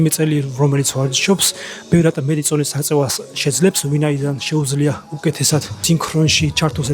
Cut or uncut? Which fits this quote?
cut